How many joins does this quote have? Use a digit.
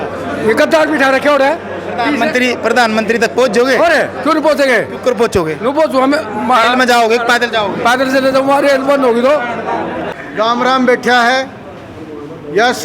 1